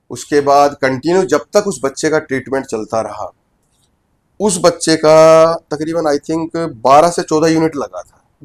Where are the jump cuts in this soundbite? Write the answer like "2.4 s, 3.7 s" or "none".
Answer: none